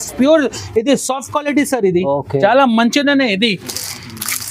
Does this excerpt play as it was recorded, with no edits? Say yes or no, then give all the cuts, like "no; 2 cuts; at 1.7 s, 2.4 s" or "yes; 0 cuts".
yes; 0 cuts